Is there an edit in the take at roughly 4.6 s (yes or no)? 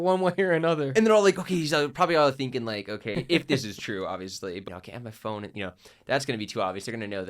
yes